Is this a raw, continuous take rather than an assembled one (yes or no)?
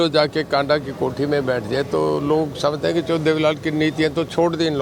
yes